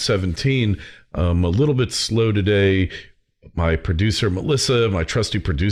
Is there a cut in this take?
no; 0 cuts

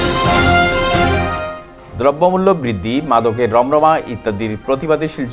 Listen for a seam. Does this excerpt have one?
yes; 1 cut; at 1.5 s

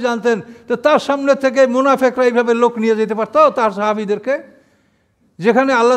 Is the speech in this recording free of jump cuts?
yes; 0 cuts

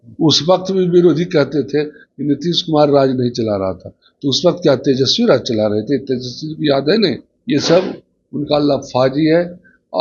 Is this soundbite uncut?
no; 1 cut; at 7.3 s

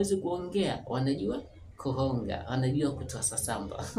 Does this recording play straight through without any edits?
yes; 0 cuts

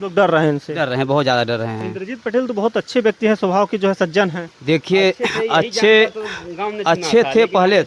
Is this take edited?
no; 0 cuts

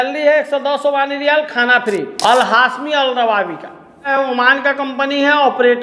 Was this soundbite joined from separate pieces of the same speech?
yes; 2 cuts; at 2.1 s, 4.1 s

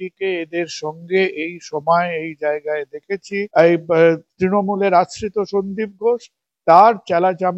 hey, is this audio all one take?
no; 1 cut; at 3.5 s

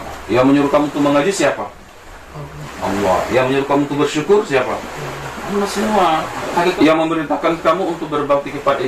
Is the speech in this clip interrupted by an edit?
yes; 1 cut; at 6.7 s

